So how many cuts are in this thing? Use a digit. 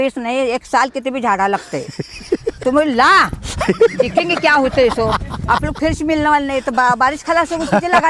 0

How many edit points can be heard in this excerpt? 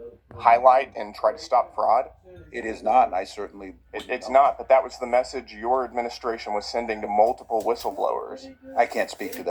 0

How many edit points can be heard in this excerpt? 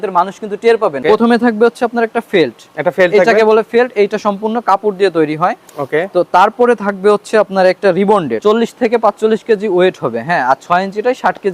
2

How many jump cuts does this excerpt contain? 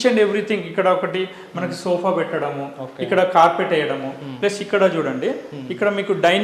0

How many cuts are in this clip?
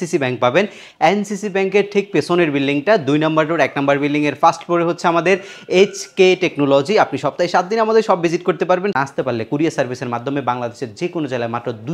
1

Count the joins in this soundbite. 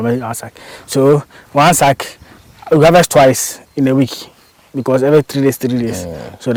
0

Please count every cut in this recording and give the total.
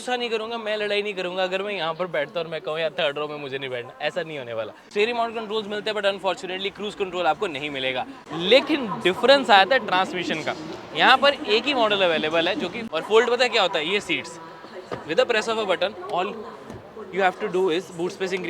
3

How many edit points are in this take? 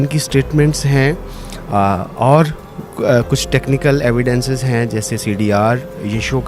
0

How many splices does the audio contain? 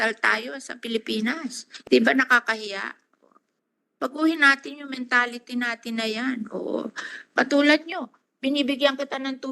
1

